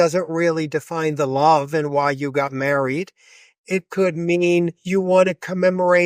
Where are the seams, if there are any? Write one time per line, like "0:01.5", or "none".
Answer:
none